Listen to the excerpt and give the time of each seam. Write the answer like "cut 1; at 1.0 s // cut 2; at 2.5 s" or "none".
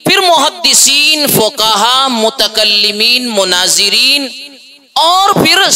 none